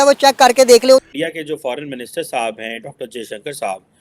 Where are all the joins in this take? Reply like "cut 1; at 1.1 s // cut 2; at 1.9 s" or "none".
cut 1; at 1.0 s